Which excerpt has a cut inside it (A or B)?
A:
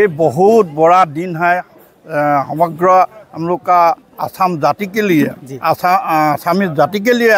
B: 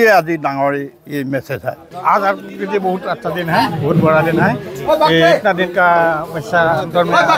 B